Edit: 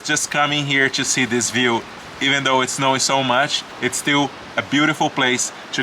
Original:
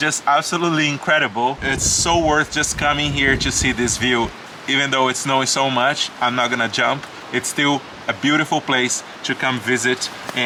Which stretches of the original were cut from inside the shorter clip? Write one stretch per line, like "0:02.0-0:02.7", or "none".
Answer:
0:06.1-0:07.1